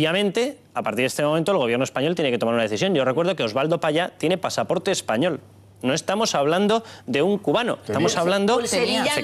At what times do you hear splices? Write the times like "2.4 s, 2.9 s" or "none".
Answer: 1.6 s